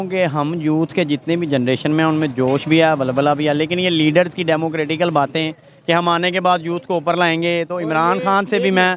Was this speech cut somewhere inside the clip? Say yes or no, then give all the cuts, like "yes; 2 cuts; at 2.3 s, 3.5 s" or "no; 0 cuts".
no; 0 cuts